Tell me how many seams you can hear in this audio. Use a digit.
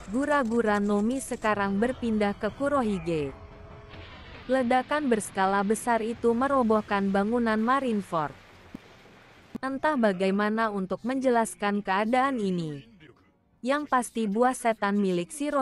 1